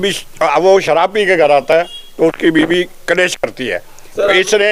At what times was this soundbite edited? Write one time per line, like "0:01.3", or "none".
none